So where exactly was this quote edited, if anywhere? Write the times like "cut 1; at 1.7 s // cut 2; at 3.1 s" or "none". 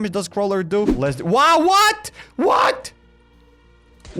cut 1; at 0.9 s